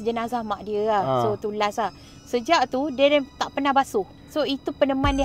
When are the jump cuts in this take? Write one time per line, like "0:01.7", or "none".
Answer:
0:04.2